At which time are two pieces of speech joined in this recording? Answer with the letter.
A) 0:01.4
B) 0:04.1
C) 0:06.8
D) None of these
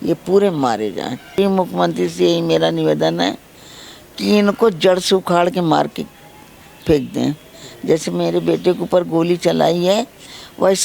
A